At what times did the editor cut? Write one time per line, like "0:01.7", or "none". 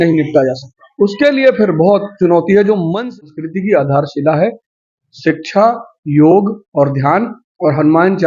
0:03.1

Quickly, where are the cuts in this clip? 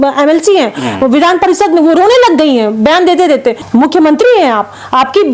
0:02.7
0:03.6

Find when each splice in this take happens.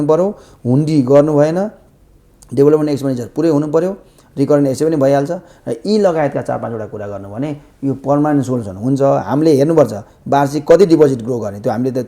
none

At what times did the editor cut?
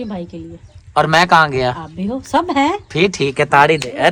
none

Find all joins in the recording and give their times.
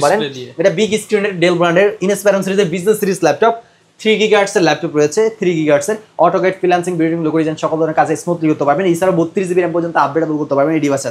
none

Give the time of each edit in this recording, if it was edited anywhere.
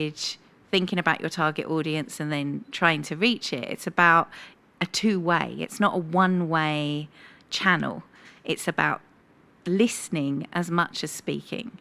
none

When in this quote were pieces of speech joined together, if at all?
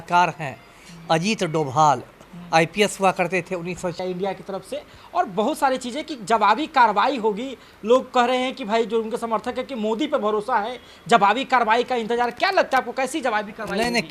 0:04.0

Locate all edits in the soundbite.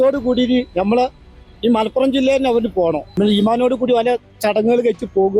0:03.1

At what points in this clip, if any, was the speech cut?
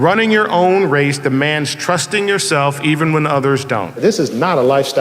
0:04.0

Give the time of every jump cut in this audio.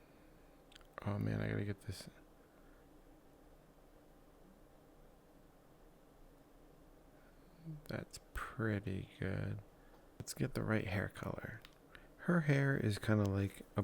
0:10.3

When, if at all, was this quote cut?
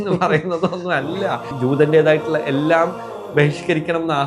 0:01.5

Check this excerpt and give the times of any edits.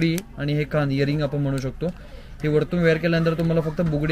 none

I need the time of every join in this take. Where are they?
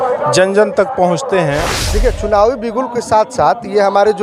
0:01.7

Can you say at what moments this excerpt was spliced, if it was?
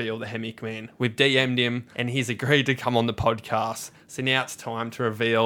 0:01.9

